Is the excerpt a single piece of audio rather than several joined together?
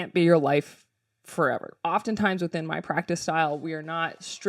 no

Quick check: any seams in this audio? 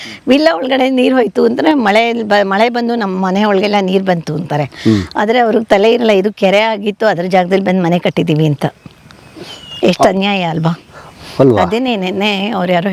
no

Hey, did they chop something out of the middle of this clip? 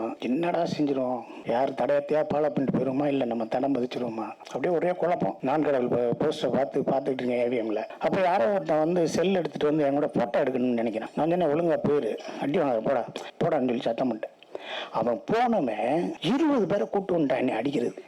yes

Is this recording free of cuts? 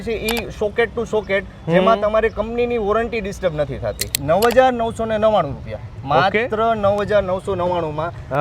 no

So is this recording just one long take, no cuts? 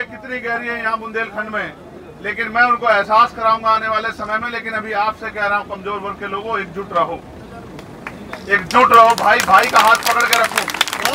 yes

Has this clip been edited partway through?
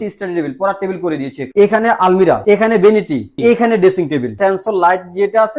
yes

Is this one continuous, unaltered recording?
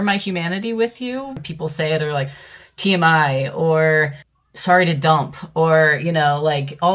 no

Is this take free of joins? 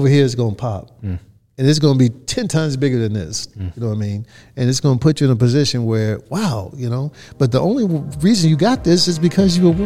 yes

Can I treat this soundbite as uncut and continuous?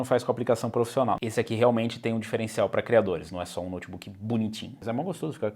no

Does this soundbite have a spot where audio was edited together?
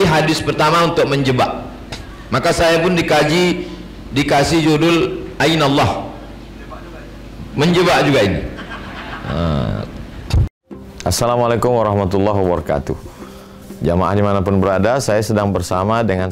yes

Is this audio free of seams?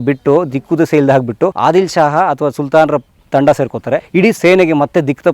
no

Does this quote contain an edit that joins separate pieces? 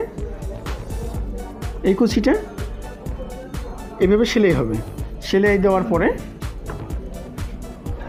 no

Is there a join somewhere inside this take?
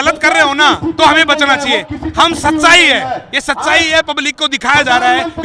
no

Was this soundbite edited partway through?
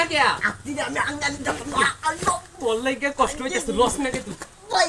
no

